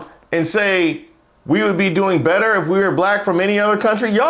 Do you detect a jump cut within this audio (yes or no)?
no